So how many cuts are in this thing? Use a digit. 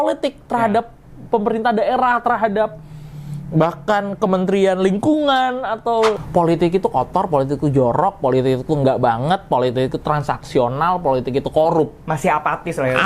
1